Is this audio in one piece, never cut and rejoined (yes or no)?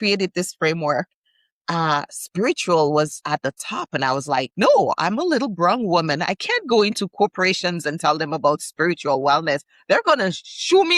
no